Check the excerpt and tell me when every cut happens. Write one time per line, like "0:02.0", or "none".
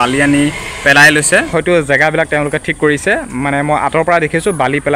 0:01.5